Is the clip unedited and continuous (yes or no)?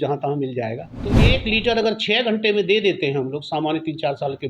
no